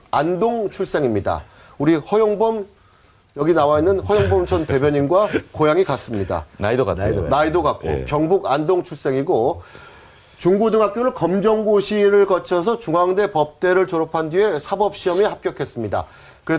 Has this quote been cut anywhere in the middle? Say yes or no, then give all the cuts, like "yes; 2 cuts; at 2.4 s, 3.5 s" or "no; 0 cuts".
no; 0 cuts